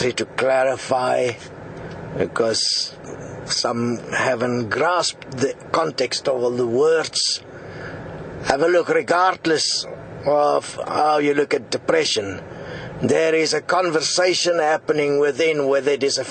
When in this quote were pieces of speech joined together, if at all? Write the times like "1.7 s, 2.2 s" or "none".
12.1 s